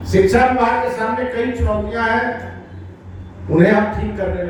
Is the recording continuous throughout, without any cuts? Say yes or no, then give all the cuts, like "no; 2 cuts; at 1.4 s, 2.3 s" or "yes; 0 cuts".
yes; 0 cuts